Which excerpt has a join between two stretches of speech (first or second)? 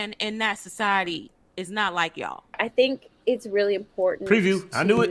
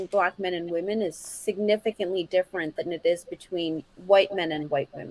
first